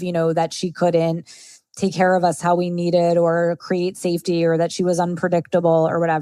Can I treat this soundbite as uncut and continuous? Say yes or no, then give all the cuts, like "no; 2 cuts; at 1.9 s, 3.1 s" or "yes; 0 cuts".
yes; 0 cuts